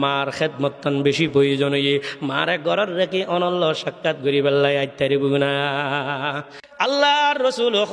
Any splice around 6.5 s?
yes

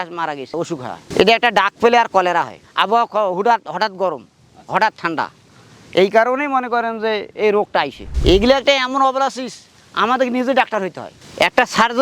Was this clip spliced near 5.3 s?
no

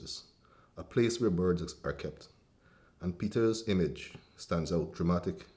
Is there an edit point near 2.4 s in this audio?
no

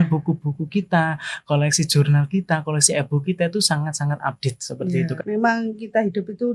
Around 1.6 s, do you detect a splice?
no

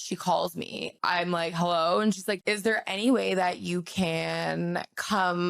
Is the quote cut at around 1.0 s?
yes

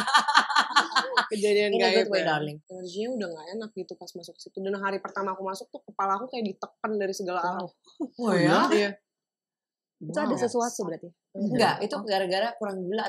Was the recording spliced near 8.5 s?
no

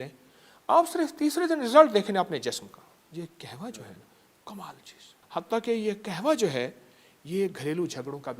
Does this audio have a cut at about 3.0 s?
yes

